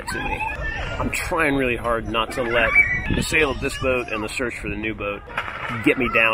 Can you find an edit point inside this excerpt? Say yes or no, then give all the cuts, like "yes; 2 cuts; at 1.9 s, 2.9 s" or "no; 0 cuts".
yes; 2 cuts; at 2.9 s, 5.3 s